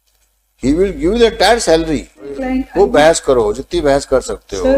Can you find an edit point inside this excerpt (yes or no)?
yes